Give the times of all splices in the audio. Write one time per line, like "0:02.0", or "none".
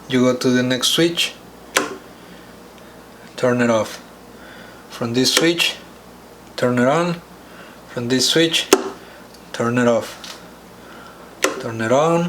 none